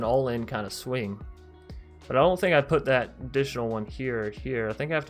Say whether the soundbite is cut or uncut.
uncut